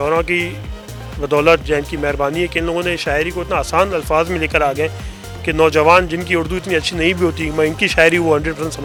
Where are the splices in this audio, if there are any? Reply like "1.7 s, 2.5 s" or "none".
none